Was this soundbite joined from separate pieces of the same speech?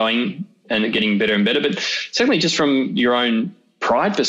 no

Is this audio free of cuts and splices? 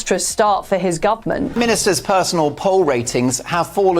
no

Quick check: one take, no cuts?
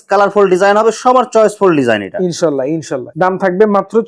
yes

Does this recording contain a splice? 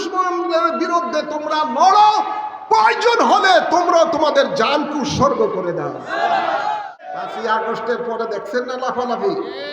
yes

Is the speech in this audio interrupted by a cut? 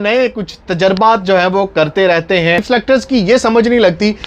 yes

